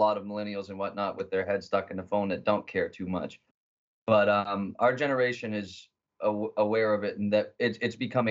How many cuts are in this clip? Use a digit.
1